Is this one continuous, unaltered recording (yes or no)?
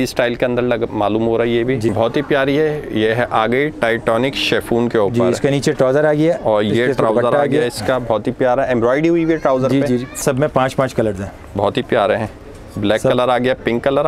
no